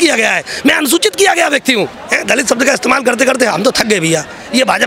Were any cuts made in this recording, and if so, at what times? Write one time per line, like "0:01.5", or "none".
0:02.0